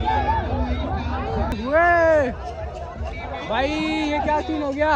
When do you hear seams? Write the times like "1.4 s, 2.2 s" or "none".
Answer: 1.6 s